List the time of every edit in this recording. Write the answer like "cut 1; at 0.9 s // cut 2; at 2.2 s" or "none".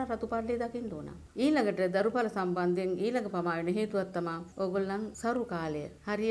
none